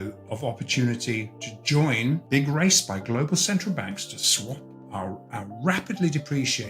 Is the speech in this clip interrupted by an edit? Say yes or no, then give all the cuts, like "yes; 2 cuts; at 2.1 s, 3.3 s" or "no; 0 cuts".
yes; 1 cut; at 2.2 s